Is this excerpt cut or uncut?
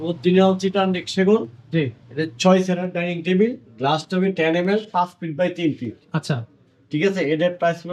uncut